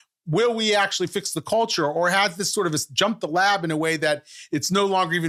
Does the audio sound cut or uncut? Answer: uncut